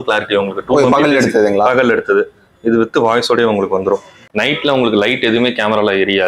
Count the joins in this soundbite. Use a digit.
1